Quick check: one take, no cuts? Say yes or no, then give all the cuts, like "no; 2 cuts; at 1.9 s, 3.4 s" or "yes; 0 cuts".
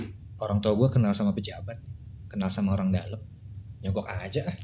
yes; 0 cuts